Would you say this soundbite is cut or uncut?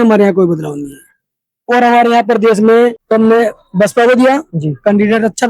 cut